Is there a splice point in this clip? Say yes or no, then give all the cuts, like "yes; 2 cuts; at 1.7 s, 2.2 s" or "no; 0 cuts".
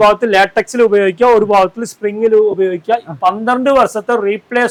no; 0 cuts